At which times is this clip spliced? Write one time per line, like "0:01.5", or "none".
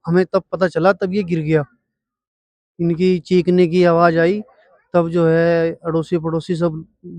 none